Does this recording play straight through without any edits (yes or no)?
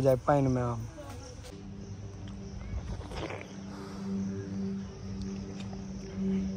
no